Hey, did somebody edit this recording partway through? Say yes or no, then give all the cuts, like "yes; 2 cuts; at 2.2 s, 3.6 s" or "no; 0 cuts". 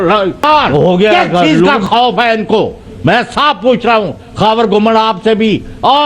yes; 1 cut; at 1.7 s